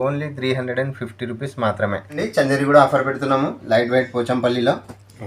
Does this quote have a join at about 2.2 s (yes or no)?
yes